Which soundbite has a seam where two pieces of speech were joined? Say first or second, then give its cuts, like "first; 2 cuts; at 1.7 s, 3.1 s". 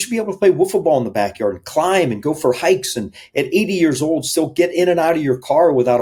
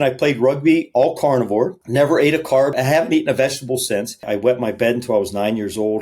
second; 3 cuts; at 1.8 s, 2.7 s, 4.3 s